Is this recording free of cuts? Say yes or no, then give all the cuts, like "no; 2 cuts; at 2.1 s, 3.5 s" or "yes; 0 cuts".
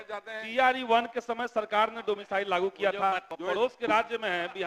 no; 1 cut; at 3.3 s